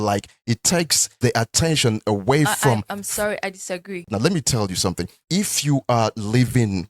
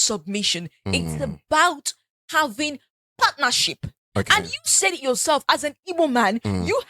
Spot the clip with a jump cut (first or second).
first